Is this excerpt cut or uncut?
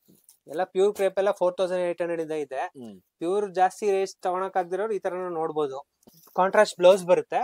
cut